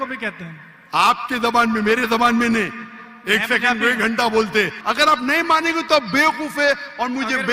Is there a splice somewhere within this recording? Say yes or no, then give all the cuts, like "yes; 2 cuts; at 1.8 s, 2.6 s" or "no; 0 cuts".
yes; 1 cut; at 4.8 s